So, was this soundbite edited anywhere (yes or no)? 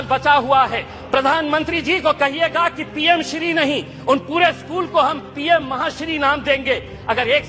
yes